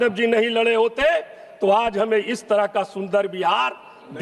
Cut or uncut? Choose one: uncut